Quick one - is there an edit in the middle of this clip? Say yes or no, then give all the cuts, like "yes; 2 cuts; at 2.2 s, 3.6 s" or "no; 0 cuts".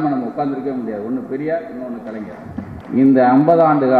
yes; 1 cut; at 2.8 s